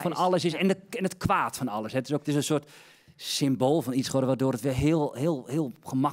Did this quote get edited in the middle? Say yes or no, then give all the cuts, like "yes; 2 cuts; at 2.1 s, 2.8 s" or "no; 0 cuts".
yes; 1 cut; at 2.2 s